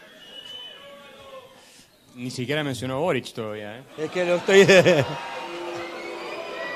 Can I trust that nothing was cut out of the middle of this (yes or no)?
yes